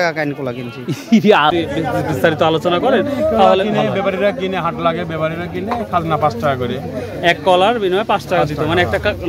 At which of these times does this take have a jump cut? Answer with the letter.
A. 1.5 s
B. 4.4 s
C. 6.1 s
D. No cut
A